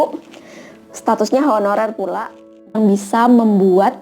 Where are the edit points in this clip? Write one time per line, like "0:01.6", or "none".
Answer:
0:02.7